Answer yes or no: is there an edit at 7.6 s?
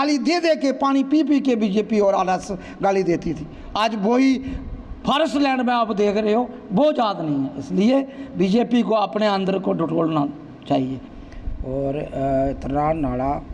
no